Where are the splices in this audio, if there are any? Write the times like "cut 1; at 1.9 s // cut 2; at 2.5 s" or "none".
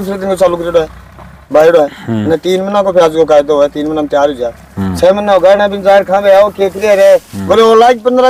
none